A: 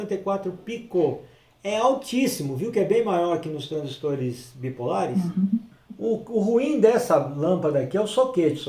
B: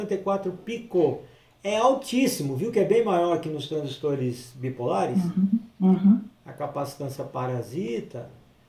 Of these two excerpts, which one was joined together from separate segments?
A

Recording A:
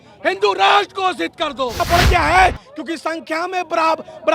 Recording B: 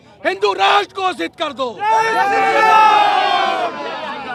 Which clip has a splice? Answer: A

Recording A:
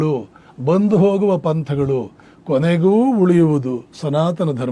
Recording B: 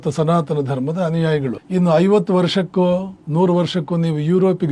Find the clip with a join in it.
B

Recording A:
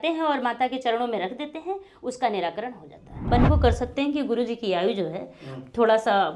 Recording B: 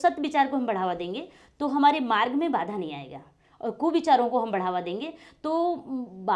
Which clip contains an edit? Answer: A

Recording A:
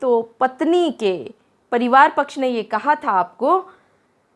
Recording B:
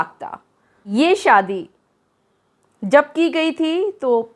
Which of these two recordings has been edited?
B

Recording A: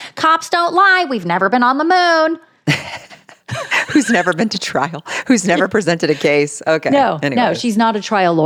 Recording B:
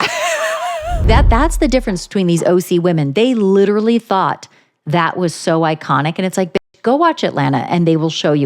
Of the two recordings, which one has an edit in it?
B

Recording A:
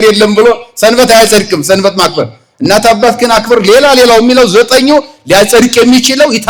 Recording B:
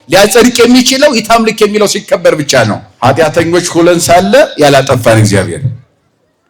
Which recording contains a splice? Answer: B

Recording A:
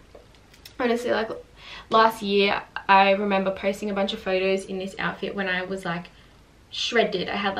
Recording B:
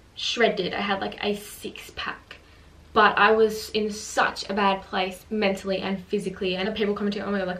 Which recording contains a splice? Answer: B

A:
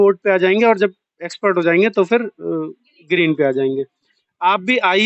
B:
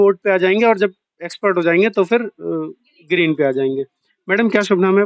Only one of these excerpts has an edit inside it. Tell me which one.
A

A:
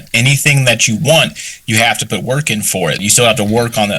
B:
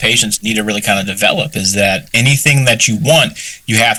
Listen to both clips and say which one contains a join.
A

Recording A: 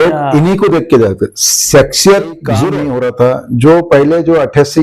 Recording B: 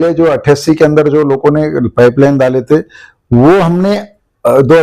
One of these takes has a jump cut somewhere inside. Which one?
A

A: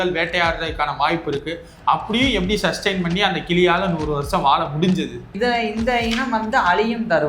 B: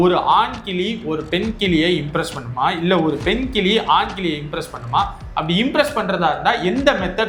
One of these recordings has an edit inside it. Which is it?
A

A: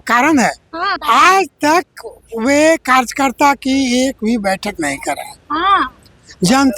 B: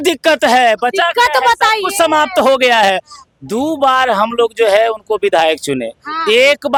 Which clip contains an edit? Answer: A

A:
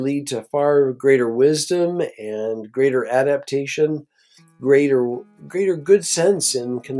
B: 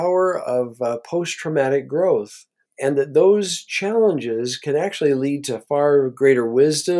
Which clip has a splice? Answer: B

